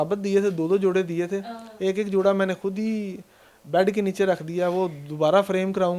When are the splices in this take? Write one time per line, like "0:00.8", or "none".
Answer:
none